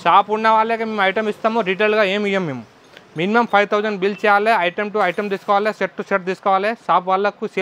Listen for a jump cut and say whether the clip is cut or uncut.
uncut